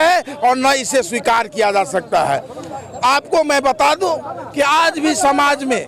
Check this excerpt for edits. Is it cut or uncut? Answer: uncut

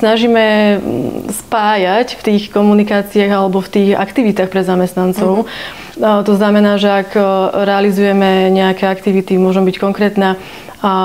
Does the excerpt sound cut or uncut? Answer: uncut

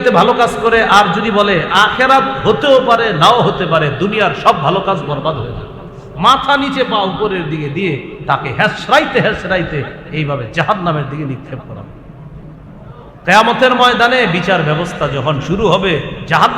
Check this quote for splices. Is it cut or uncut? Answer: cut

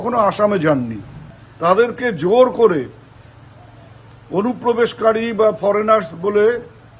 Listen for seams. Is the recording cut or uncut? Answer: uncut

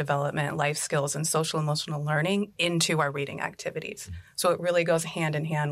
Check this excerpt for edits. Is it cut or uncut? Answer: uncut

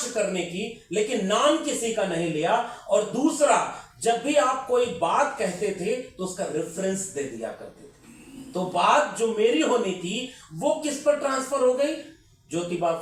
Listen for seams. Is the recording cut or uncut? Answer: uncut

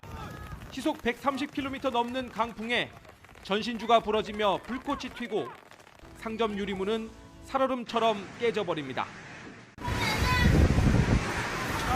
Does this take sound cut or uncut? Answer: uncut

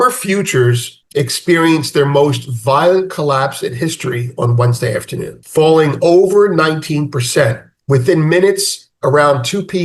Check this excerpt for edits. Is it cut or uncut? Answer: cut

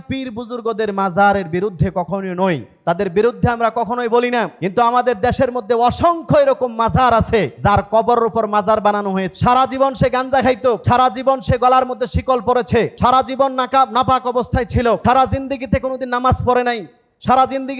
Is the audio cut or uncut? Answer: cut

